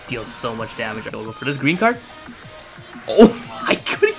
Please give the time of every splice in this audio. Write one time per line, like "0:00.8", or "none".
0:01.1